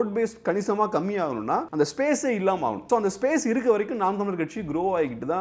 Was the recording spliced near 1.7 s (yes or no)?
yes